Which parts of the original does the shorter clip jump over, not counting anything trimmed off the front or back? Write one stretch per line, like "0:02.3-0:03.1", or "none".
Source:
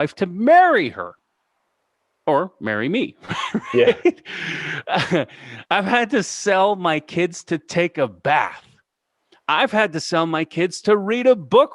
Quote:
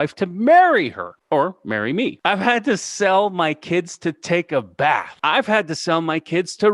0:01.1-0:02.0
0:03.1-0:05.6
0:08.6-0:09.4